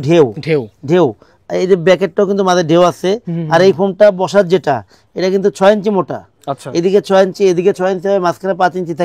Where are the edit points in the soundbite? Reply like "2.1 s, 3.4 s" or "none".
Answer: none